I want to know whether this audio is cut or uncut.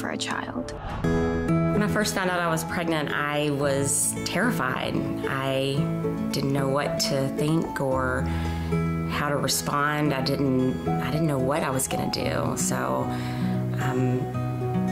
cut